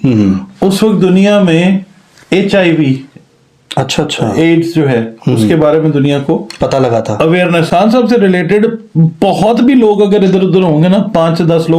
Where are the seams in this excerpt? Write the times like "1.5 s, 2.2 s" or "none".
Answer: 7.7 s